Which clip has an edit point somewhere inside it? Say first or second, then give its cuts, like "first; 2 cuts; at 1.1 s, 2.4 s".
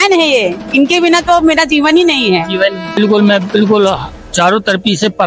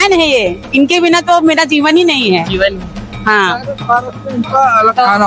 first; 1 cut; at 3.0 s